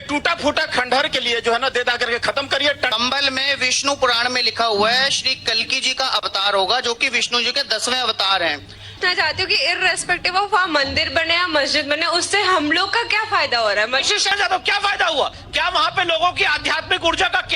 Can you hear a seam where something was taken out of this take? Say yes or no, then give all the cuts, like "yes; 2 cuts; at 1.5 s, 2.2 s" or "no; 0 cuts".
yes; 3 cuts; at 2.9 s, 9.0 s, 14.3 s